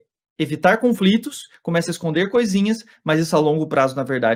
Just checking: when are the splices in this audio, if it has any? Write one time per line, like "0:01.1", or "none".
none